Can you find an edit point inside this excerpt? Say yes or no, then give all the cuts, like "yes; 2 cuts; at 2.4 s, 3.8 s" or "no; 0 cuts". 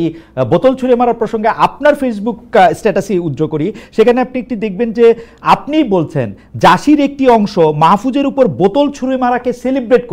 no; 0 cuts